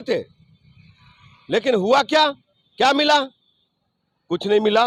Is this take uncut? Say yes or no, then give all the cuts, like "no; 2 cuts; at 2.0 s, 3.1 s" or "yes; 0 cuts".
yes; 0 cuts